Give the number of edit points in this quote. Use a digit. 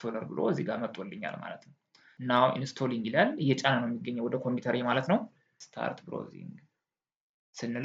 2